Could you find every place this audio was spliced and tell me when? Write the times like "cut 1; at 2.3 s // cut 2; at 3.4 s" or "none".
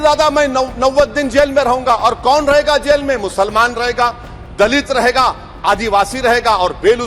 none